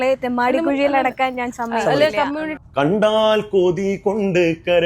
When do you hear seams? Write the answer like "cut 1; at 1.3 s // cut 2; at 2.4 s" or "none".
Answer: cut 1; at 2.6 s

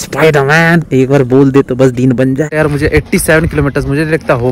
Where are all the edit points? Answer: cut 1; at 2.5 s

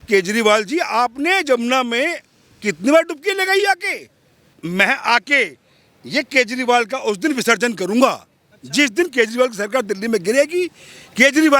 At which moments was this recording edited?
cut 1; at 4.6 s

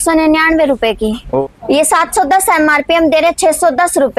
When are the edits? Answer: cut 1; at 1.4 s

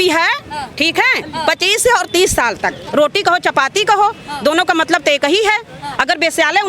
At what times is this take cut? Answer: cut 1; at 2.8 s

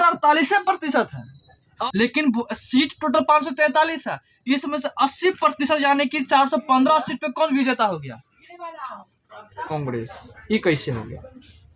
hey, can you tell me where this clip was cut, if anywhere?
cut 1; at 1.6 s

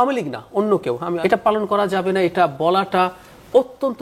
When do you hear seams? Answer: cut 1; at 1.1 s

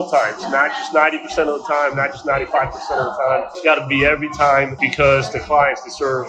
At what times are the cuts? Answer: none

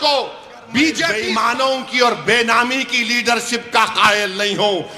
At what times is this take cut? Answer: cut 1; at 1.2 s

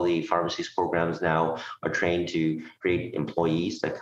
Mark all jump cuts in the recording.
cut 1; at 2.7 s

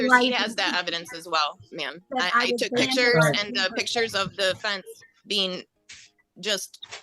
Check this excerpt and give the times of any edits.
none

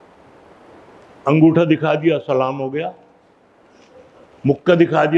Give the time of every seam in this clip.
none

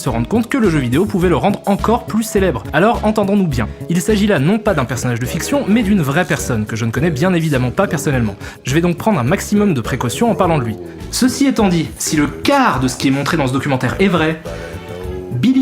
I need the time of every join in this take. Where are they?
cut 1; at 1.4 s

